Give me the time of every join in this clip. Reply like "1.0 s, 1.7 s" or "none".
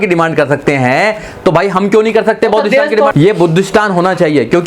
3.1 s